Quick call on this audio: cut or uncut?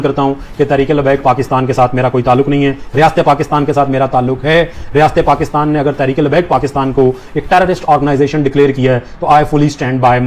uncut